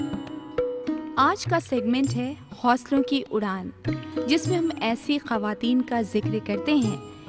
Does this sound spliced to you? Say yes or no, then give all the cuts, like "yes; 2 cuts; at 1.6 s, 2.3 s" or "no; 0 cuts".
no; 0 cuts